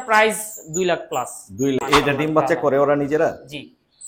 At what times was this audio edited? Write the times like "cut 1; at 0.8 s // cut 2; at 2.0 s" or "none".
cut 1; at 1.8 s

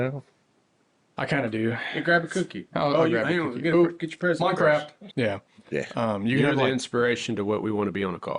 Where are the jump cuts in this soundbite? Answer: cut 1; at 5.0 s

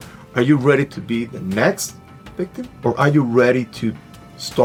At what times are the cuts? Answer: none

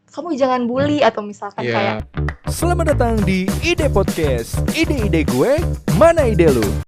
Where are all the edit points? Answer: cut 1; at 2.1 s

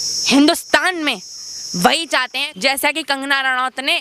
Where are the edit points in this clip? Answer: cut 1; at 2.4 s

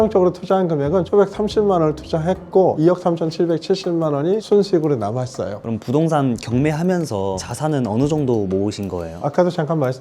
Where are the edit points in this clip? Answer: cut 1; at 5.5 s

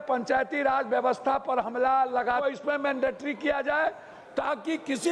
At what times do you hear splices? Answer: cut 1; at 2.4 s

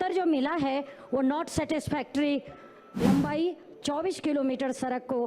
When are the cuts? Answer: cut 1; at 3.0 s

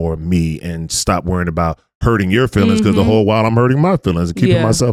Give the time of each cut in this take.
none

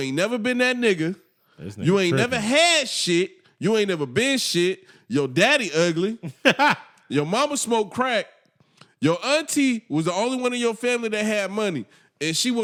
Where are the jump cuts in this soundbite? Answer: none

